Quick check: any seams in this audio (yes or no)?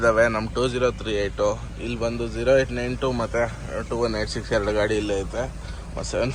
no